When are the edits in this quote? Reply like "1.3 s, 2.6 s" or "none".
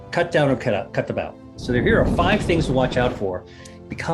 1.5 s